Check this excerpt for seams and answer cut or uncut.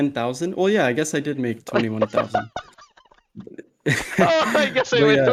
uncut